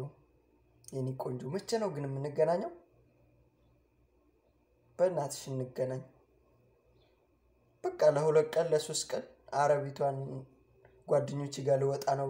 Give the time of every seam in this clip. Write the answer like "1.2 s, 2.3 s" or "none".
none